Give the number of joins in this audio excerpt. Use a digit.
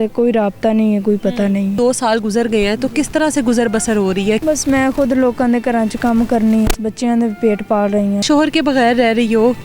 4